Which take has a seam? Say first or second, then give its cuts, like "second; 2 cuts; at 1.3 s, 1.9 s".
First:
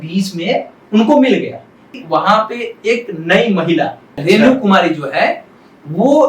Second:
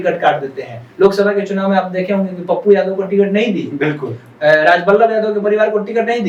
first; 2 cuts; at 2.0 s, 4.1 s